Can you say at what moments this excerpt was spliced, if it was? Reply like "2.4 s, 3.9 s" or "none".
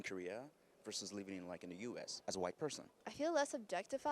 2.1 s